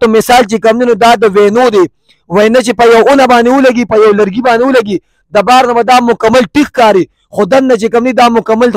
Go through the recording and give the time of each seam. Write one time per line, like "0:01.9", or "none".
none